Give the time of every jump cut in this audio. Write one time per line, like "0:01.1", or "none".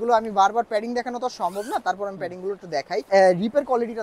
0:03.1